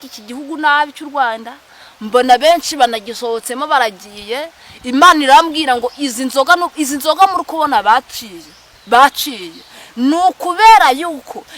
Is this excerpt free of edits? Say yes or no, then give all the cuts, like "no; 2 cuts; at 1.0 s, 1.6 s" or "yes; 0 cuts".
yes; 0 cuts